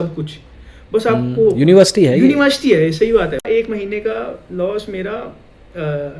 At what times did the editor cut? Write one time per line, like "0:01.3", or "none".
0:03.4